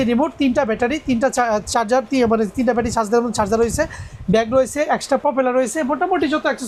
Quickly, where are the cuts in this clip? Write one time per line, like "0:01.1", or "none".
none